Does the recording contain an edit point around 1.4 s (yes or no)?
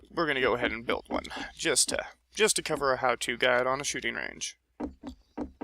no